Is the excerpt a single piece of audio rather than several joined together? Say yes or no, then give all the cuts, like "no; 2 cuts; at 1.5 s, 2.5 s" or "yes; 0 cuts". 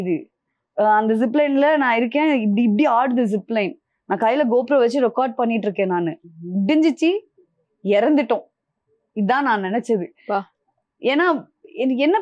yes; 0 cuts